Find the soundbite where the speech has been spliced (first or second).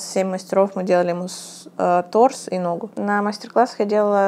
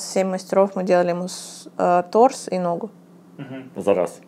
first